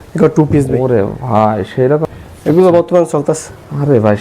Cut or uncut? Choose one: cut